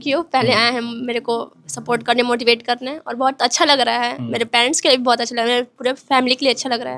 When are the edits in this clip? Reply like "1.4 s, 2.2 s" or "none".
none